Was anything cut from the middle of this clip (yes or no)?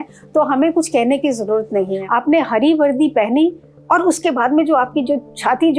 yes